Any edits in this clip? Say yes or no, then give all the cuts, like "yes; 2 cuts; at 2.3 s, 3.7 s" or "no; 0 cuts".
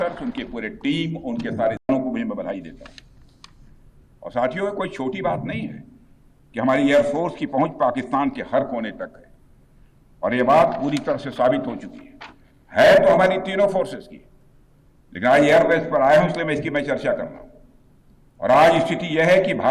yes; 1 cut; at 1.9 s